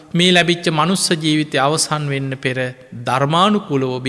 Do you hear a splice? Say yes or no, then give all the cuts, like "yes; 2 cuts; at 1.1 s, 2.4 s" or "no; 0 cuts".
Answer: no; 0 cuts